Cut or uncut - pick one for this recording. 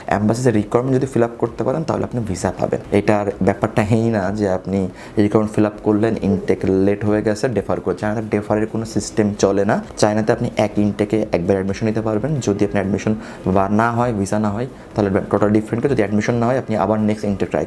uncut